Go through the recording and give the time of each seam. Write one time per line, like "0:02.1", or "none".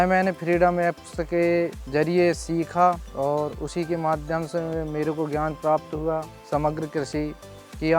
0:01.8
0:03.1
0:06.4